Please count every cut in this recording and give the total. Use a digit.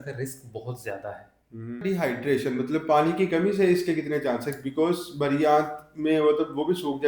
1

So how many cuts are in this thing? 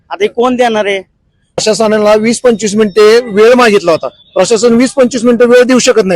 1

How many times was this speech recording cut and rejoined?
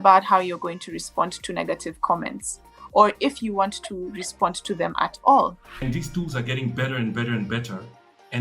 1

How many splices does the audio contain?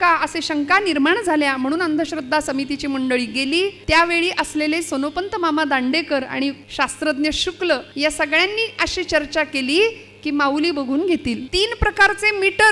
4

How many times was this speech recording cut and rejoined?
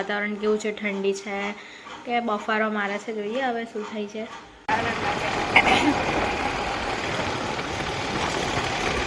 1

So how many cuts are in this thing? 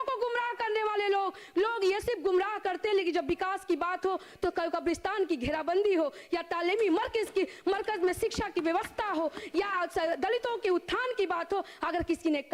0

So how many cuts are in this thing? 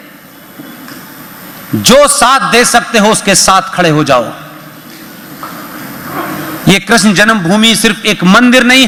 0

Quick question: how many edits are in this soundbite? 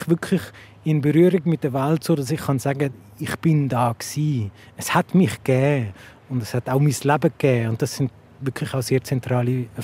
0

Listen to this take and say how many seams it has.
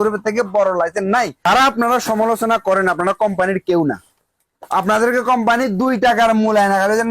1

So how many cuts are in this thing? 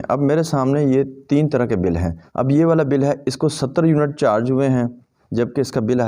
1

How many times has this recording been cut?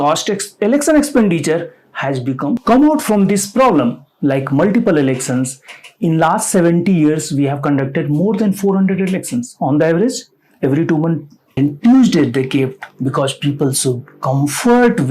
2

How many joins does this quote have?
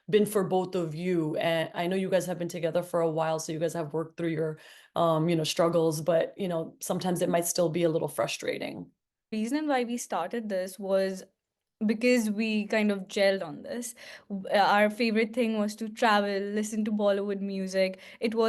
1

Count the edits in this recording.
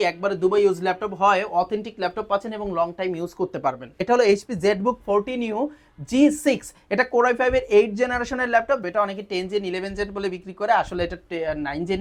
2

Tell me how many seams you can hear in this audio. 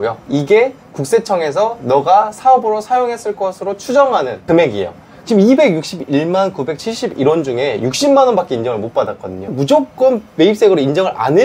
2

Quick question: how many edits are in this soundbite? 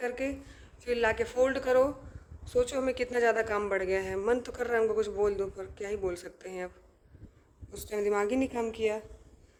0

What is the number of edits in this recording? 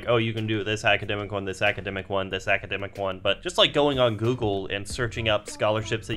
1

